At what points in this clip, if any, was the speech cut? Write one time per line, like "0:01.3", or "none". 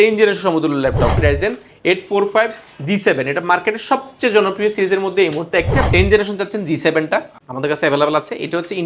0:01.1
0:05.9